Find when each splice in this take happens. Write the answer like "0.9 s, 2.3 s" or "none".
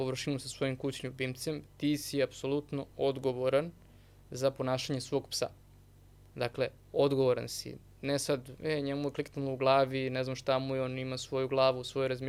none